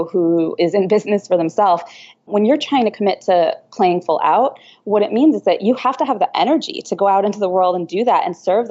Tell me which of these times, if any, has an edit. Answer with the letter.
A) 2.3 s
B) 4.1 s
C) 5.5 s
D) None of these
A